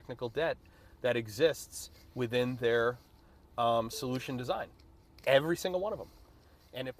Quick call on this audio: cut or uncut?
uncut